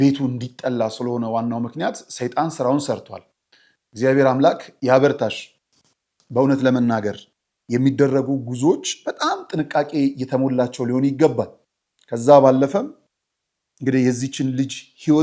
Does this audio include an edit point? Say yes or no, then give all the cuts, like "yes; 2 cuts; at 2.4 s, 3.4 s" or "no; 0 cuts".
no; 0 cuts